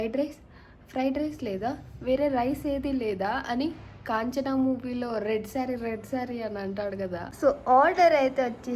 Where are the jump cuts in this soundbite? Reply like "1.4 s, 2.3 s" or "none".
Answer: 7.2 s